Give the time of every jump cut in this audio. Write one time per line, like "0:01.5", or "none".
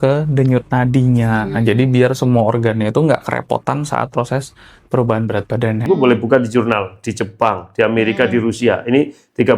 0:05.8